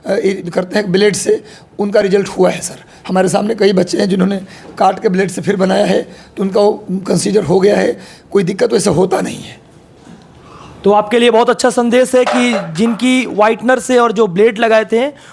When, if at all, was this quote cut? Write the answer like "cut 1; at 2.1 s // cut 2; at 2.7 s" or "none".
none